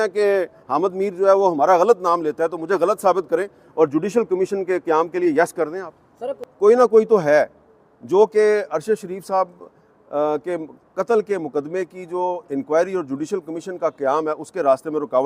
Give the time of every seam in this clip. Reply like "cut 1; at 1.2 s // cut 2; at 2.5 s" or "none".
cut 1; at 6.5 s